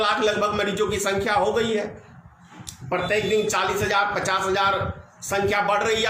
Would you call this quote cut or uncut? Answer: uncut